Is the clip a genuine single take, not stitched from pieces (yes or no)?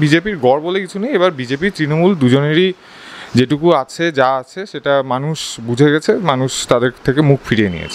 yes